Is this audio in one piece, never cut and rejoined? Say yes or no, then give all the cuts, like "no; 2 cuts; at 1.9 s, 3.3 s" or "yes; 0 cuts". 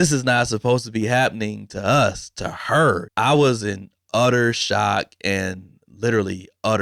yes; 0 cuts